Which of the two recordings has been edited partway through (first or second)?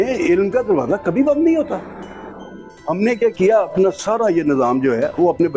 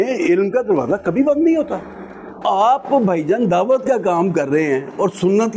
second